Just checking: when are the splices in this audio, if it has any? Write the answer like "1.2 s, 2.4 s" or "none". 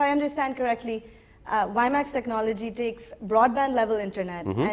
1.4 s